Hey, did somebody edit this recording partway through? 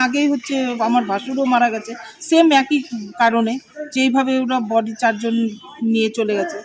no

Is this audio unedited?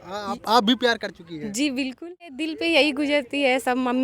no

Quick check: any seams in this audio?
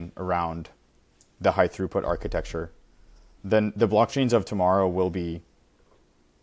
no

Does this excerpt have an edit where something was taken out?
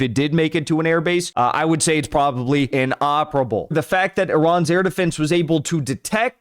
yes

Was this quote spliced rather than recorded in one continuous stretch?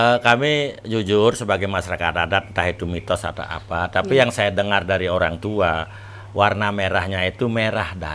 no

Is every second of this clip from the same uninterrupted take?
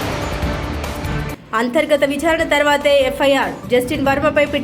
no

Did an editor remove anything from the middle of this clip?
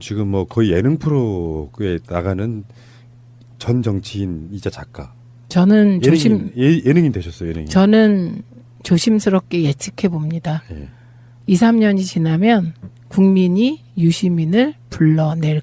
yes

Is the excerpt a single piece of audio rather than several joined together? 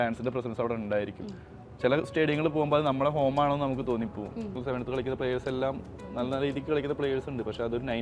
no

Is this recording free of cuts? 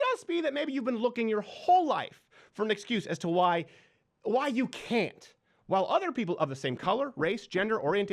yes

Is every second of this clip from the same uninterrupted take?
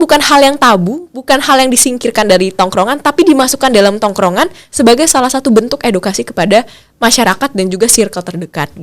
yes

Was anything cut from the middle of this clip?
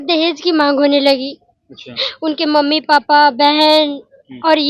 no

